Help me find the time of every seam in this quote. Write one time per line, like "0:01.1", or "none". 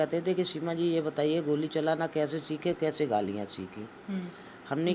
none